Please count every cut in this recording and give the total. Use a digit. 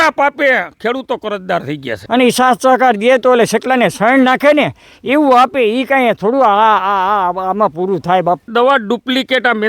2